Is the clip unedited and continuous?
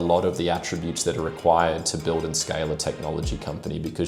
yes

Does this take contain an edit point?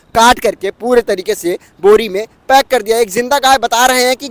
no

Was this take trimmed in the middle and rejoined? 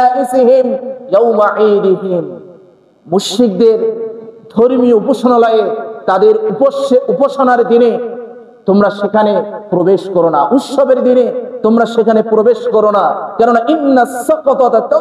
no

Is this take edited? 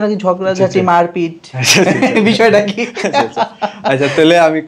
no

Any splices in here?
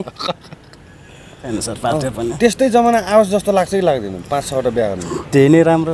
yes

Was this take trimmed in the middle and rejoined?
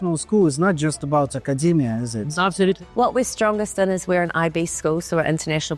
yes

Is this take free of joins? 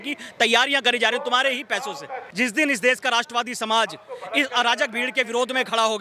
no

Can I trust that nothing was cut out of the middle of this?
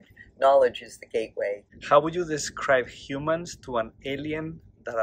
no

